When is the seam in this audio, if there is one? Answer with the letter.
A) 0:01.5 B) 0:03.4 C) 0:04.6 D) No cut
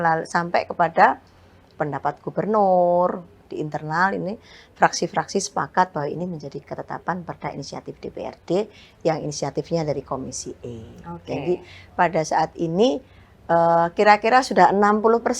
B